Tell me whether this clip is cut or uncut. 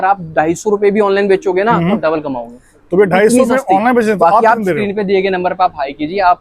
uncut